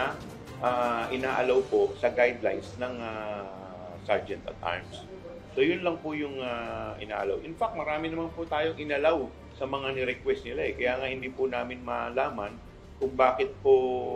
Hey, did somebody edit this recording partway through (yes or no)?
no